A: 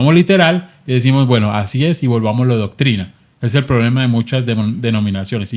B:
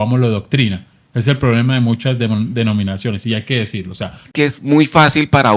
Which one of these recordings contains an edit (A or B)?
B